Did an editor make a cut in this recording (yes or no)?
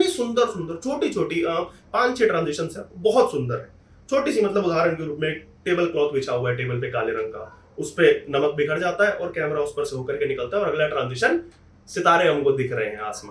no